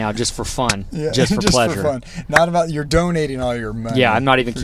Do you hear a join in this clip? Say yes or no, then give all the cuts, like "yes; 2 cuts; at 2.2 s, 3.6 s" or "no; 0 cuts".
no; 0 cuts